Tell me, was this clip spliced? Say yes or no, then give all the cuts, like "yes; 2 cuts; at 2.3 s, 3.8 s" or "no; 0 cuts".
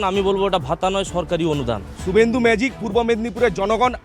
yes; 1 cut; at 2.0 s